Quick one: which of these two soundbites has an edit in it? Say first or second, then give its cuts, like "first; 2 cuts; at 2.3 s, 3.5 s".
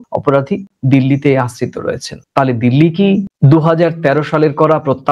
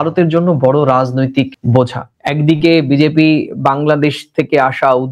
second; 1 cut; at 2.1 s